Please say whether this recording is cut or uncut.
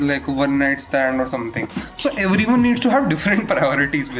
uncut